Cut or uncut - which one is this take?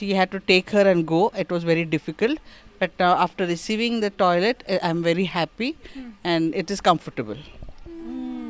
uncut